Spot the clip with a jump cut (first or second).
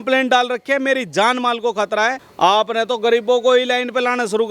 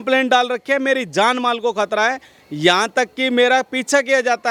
first